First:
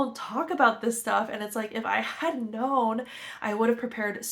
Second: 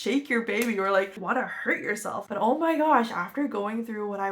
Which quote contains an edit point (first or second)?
second